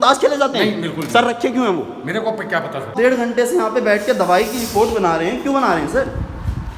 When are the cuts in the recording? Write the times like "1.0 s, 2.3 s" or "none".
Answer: 2.9 s